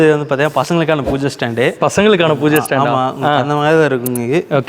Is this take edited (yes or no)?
no